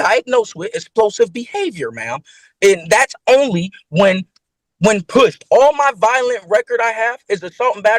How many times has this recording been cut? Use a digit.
0